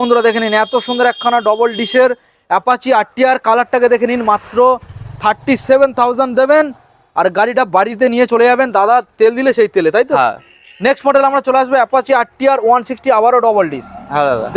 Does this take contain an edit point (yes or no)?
no